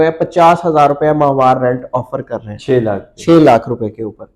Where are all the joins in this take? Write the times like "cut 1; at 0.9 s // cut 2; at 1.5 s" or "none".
none